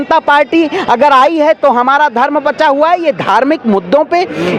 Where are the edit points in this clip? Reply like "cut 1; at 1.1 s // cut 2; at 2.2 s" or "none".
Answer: none

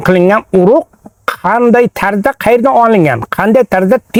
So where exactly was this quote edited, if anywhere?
none

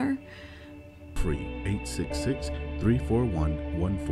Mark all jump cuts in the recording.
cut 1; at 1.2 s

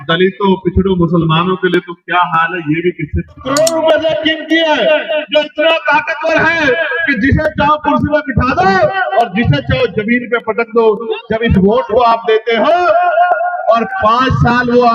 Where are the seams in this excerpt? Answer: cut 1; at 3.4 s

